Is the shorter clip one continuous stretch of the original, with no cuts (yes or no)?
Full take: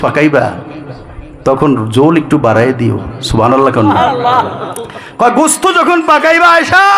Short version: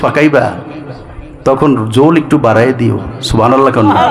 yes